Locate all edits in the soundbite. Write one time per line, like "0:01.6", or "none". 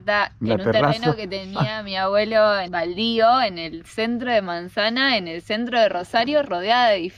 none